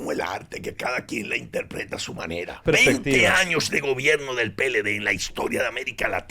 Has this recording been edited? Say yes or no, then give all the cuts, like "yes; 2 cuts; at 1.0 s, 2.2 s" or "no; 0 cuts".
yes; 1 cut; at 2.6 s